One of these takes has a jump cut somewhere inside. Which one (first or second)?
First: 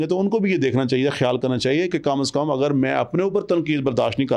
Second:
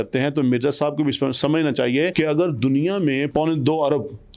second